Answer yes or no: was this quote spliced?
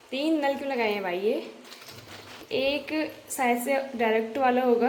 no